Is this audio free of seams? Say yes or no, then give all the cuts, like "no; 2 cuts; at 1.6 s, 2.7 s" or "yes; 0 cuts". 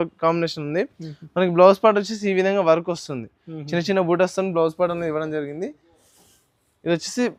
yes; 0 cuts